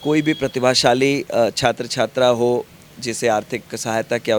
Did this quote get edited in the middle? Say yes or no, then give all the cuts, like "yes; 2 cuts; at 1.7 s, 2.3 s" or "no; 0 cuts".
no; 0 cuts